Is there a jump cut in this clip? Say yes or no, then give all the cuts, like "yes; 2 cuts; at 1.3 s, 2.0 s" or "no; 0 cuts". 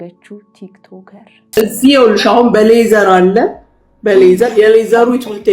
yes; 1 cut; at 1.6 s